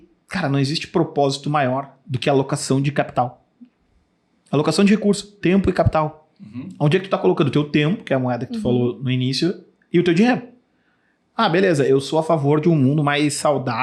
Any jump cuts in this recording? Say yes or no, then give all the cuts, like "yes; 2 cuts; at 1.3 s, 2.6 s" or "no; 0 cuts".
no; 0 cuts